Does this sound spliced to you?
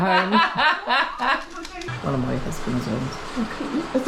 yes; 1 cut; at 1.8 s

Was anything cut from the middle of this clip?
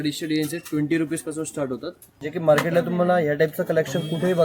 yes; 1 cut; at 2.2 s

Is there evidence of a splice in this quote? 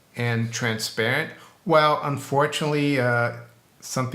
no; 0 cuts

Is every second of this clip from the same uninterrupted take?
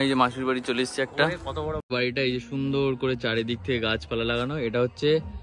no; 1 cut; at 1.8 s

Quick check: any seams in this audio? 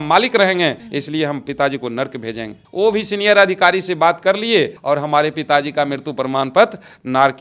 no; 0 cuts

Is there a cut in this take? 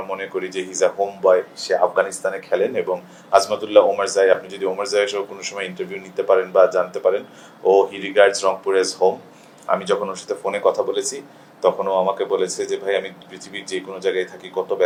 no; 0 cuts

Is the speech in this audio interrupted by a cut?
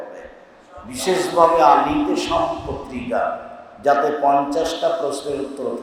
no; 0 cuts

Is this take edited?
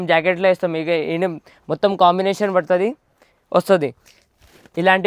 no; 0 cuts

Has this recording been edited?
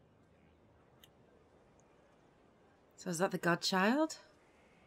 yes; 1 cut; at 3.6 s

